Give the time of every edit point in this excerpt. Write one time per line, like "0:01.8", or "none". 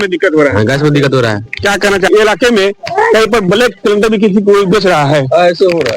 0:02.1